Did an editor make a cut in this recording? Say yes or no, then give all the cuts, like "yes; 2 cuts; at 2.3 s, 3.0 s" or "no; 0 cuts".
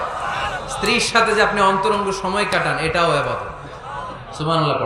no; 0 cuts